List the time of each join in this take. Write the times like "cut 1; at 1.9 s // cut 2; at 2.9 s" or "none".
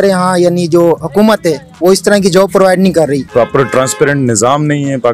cut 1; at 3.2 s